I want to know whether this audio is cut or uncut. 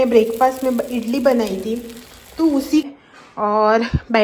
cut